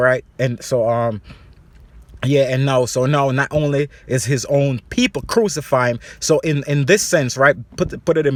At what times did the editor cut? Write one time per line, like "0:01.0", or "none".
none

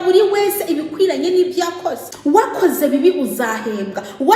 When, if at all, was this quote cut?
0:02.1

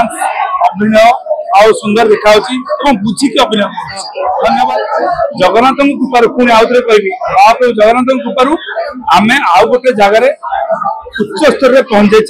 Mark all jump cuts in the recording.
0:04.4

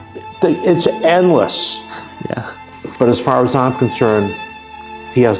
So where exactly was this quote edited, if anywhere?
0:02.5

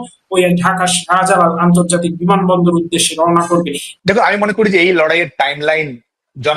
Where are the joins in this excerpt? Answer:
0:03.8

